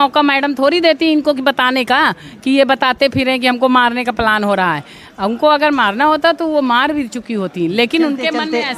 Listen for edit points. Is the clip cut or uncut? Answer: uncut